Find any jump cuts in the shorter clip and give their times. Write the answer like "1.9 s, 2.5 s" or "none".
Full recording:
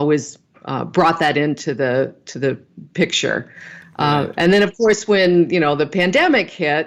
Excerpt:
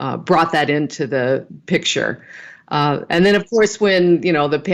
1.5 s